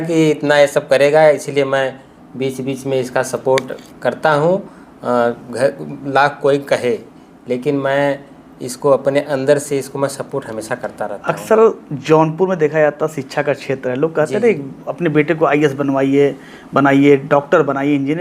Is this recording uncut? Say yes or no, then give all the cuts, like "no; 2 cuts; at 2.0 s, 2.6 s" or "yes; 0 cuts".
yes; 0 cuts